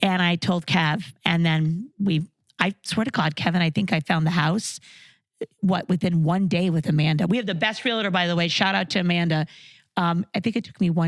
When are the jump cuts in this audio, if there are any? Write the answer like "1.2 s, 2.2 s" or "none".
none

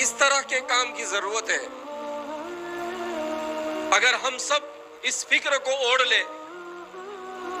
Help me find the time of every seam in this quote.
1.7 s, 3.9 s

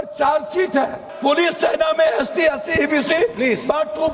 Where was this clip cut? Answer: 1.1 s

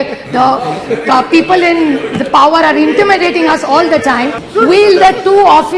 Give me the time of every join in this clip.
4.4 s

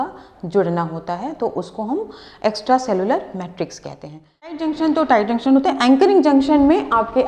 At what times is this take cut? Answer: 4.6 s

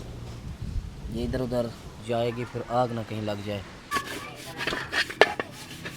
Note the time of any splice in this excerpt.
3.9 s

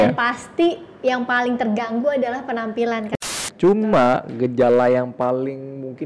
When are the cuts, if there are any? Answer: 3.1 s

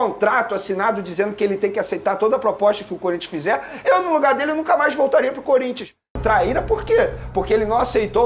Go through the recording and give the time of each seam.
6.2 s

